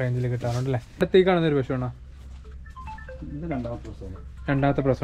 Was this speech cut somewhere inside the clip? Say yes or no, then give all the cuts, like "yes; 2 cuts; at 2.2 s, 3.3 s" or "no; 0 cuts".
yes; 1 cut; at 1.0 s